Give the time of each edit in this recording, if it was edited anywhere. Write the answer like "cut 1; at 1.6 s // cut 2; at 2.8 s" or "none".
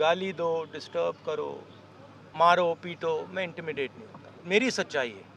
cut 1; at 2.2 s // cut 2; at 4.3 s